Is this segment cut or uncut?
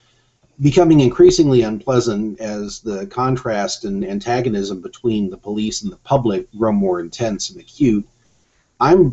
uncut